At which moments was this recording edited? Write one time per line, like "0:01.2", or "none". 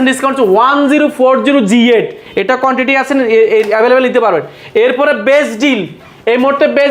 none